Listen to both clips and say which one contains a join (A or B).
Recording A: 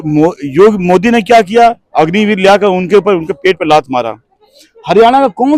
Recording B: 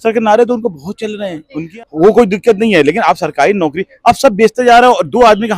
B